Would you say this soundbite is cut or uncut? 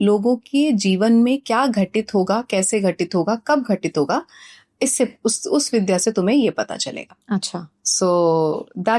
uncut